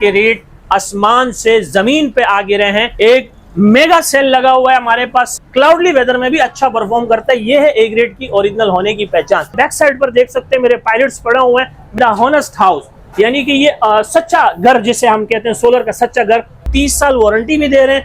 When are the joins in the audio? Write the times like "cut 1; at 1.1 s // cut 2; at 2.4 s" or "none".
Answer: cut 1; at 2.9 s // cut 2; at 5.3 s // cut 3; at 9.5 s // cut 4; at 12.0 s // cut 5; at 16.5 s